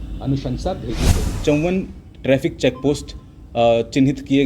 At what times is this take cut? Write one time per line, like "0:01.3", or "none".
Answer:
0:01.3